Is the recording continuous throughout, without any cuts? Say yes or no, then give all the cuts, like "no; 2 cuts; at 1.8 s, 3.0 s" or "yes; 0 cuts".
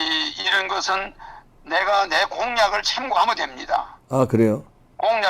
yes; 0 cuts